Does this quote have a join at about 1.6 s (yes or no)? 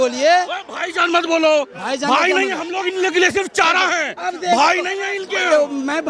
no